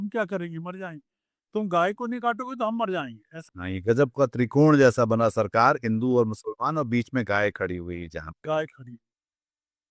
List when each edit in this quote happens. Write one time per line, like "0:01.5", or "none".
0:03.4